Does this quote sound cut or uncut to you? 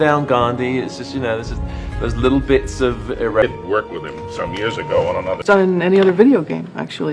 cut